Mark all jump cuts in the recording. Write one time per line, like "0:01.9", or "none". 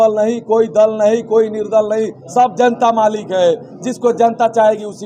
none